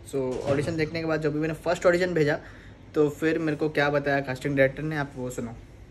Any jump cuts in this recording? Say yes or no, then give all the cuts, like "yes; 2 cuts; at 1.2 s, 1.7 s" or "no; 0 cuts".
no; 0 cuts